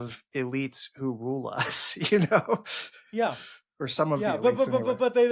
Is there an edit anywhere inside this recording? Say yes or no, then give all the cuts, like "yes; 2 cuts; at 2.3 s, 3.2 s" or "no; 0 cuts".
no; 0 cuts